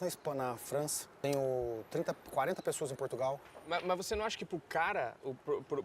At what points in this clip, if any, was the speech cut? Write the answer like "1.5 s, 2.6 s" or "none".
1.0 s

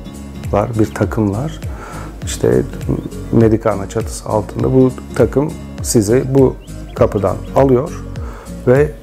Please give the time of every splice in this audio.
none

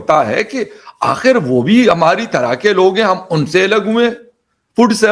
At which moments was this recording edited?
none

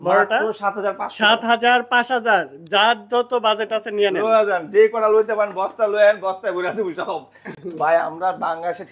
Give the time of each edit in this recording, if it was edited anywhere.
none

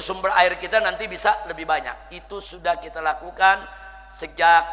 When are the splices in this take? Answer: none

